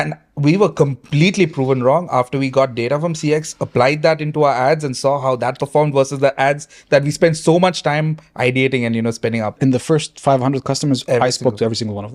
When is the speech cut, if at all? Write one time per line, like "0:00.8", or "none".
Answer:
0:09.6